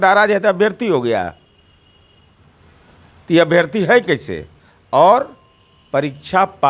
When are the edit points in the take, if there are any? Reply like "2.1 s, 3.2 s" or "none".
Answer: none